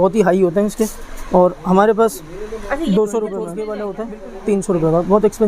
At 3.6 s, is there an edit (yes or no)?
yes